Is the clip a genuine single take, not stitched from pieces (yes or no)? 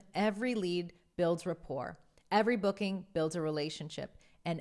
yes